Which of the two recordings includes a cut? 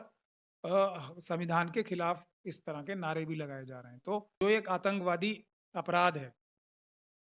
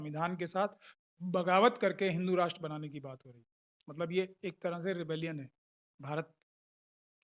first; 1 cut; at 4.4 s

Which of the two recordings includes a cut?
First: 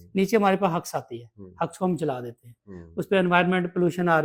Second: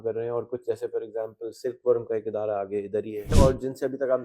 second; 1 cut; at 3.4 s

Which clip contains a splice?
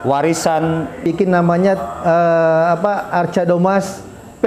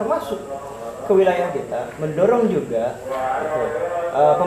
first; 1 cut; at 1.1 s

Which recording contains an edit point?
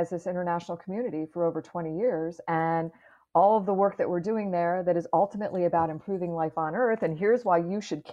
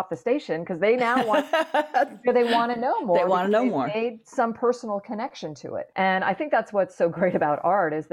second; 1 cut; at 5.9 s

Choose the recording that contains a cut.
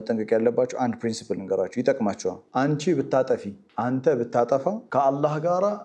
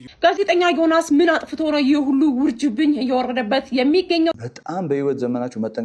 second; 1 cut; at 4.3 s

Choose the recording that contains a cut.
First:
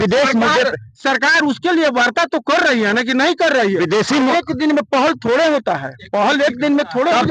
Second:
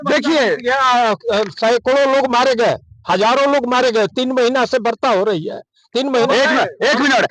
second; 1 cut; at 6.3 s

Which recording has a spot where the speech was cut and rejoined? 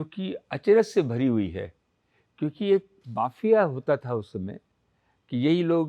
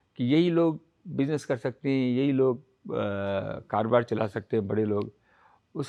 first; 1 cut; at 3.0 s

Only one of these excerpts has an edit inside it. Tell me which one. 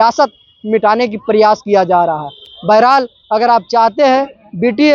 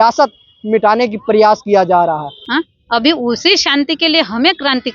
second; 1 cut; at 2.4 s

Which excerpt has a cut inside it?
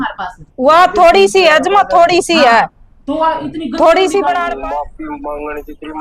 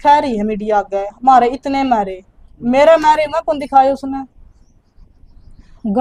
first; 1 cut; at 4.5 s

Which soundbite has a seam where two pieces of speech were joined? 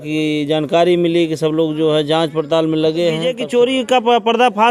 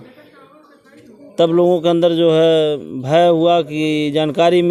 first; 1 cut; at 3.3 s

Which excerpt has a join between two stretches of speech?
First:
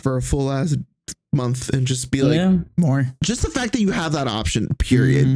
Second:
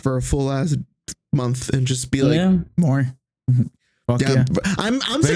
first; 1 cut; at 3.2 s

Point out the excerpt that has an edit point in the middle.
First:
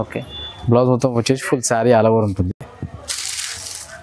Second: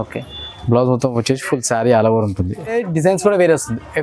second; 1 cut; at 2.7 s

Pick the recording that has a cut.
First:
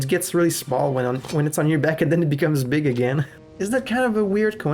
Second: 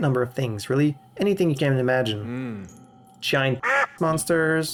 first; 1 cut; at 3.4 s

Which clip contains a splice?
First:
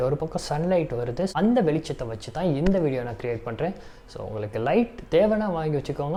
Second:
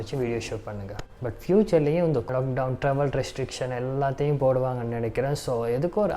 second; 2 cuts; at 1.0 s, 2.3 s

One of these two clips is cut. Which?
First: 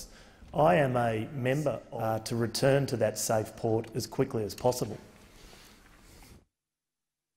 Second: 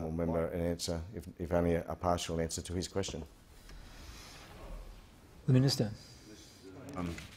first; 1 cut; at 1.9 s

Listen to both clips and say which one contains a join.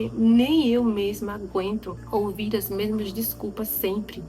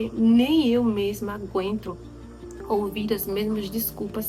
first; 1 cut; at 2.0 s

